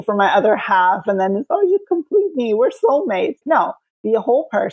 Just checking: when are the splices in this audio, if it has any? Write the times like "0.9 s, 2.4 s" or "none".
3.6 s